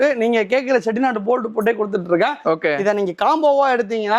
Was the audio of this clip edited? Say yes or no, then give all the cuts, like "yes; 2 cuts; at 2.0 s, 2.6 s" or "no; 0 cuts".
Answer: no; 0 cuts